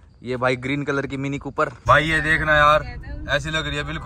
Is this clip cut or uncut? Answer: cut